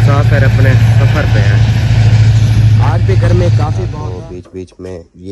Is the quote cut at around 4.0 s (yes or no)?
yes